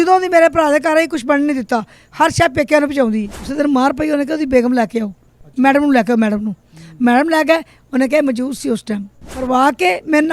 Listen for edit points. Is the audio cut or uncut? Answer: cut